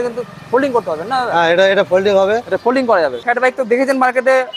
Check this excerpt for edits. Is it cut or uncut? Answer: cut